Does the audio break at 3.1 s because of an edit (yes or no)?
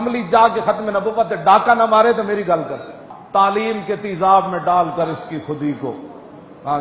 yes